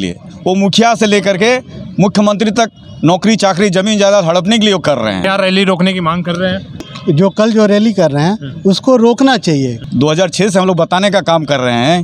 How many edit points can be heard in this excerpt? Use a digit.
3